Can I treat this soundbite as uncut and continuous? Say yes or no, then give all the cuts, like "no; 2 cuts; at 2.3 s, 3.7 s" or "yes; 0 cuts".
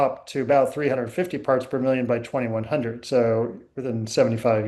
yes; 0 cuts